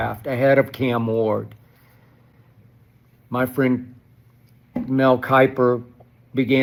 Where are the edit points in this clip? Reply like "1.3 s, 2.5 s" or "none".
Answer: none